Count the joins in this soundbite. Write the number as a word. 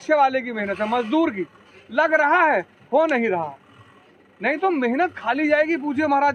zero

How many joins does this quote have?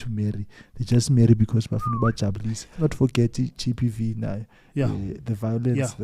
one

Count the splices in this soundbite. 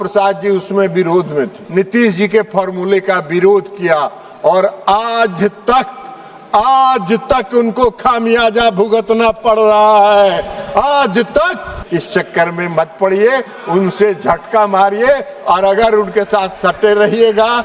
two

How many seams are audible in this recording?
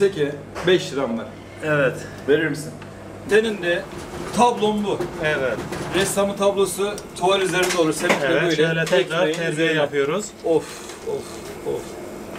one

